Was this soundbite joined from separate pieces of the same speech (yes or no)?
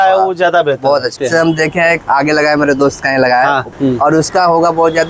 yes